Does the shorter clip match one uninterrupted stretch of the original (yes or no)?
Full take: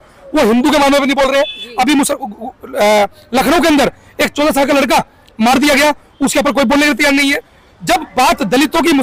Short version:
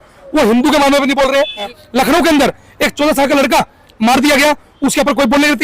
no